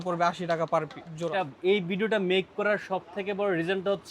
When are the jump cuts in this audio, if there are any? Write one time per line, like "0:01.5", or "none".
0:01.3